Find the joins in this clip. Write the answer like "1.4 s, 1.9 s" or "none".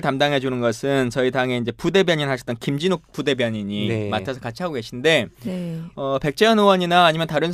4.3 s